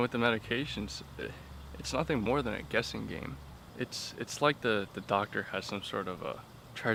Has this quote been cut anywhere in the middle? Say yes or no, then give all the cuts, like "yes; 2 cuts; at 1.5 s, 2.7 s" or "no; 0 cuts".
no; 0 cuts